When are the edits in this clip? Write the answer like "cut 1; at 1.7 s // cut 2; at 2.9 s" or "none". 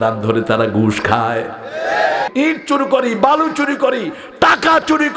cut 1; at 2.3 s